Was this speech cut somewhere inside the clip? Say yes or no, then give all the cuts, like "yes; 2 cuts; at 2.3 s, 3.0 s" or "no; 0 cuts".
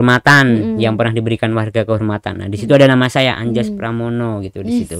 no; 0 cuts